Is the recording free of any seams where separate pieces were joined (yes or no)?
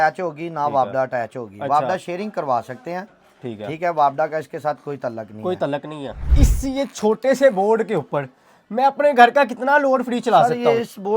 no